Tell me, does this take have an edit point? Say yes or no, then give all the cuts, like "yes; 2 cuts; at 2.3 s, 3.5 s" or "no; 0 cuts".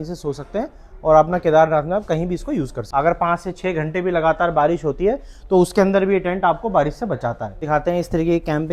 yes; 2 cuts; at 2.8 s, 7.6 s